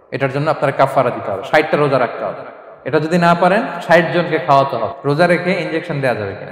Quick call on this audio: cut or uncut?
cut